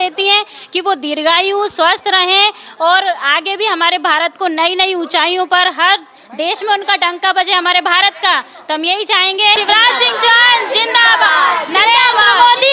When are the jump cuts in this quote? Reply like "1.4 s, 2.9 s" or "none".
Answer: 9.6 s